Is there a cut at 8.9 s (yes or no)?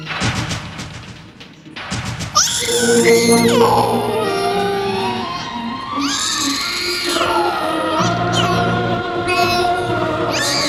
no